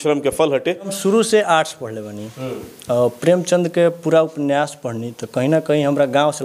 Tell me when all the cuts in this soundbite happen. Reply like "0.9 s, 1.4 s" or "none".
0.9 s